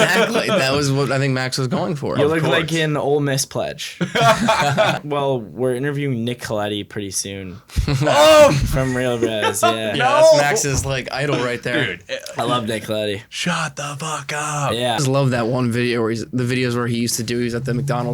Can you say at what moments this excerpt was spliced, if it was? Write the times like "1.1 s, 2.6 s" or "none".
5.0 s, 15.0 s